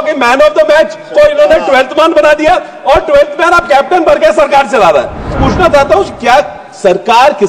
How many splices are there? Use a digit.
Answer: 1